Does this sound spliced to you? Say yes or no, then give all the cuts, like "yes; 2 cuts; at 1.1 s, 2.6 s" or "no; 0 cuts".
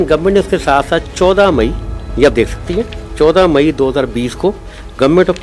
no; 0 cuts